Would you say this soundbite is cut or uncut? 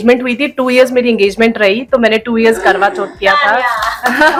uncut